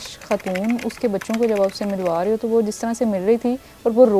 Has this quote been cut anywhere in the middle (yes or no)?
no